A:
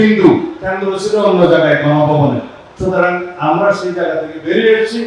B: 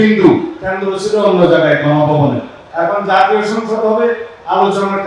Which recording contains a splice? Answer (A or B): B